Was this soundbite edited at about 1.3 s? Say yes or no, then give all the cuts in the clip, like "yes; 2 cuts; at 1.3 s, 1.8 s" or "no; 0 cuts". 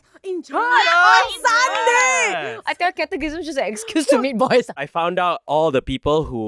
no; 2 cuts; at 2.6 s, 4.8 s